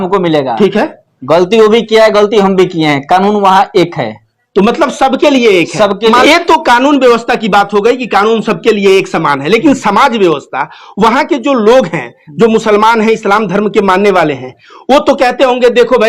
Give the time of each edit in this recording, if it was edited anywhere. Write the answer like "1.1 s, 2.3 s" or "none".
6.2 s